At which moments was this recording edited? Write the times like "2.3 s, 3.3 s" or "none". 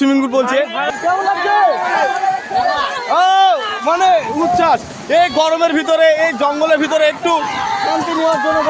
1.0 s

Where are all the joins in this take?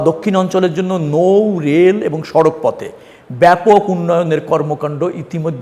none

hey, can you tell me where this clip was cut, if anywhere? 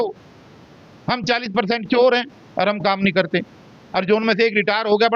none

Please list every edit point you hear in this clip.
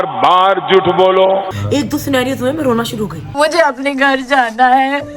1.6 s

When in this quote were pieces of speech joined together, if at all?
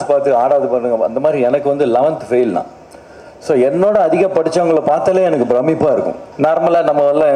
6.2 s

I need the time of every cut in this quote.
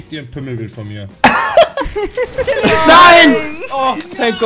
2.6 s

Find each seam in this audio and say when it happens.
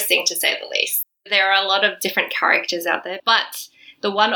1.1 s, 3.1 s

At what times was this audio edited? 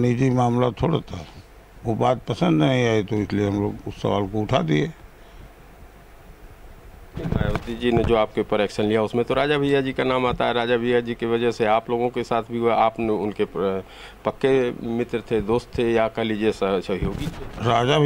none

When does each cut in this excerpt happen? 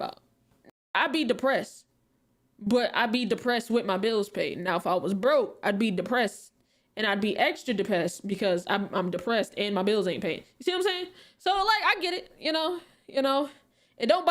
0.9 s

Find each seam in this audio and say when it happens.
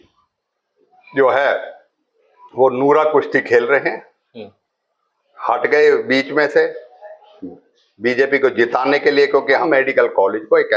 9.6 s

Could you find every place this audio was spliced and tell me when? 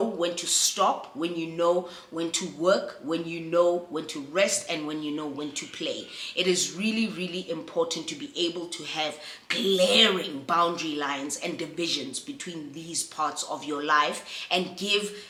none

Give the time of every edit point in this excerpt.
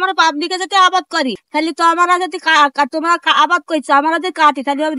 1.4 s

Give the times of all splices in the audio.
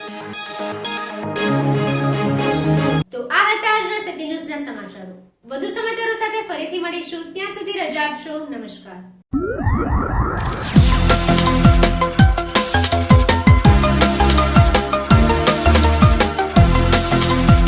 none

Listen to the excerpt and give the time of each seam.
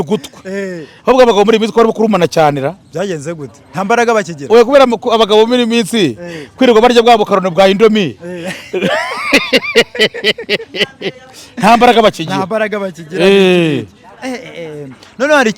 none

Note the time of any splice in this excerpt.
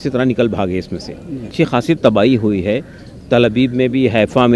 1.5 s

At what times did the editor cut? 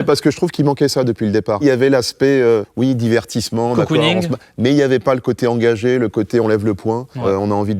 none

